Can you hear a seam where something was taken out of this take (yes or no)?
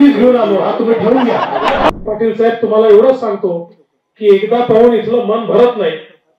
yes